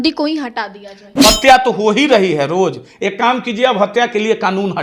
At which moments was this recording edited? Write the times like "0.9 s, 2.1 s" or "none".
1.0 s